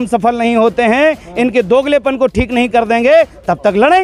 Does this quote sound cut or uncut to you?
uncut